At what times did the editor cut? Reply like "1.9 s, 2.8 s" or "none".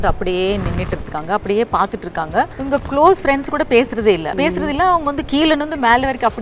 2.6 s, 4.3 s